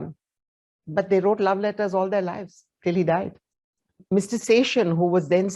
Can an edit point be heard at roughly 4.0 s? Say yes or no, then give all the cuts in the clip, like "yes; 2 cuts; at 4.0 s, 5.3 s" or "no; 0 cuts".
yes; 1 cut; at 4.0 s